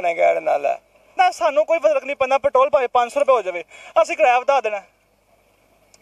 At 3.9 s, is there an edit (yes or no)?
no